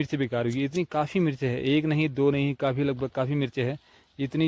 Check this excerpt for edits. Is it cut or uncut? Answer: uncut